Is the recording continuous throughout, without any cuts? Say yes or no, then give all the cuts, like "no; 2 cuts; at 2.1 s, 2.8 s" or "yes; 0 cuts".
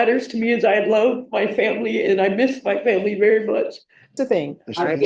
no; 1 cut; at 4.1 s